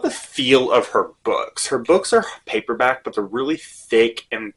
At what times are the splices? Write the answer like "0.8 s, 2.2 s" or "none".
none